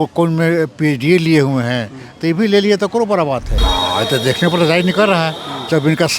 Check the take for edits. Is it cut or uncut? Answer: cut